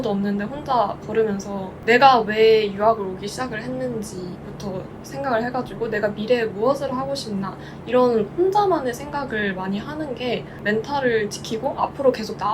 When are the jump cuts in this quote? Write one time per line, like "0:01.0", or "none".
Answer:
0:01.7
0:10.6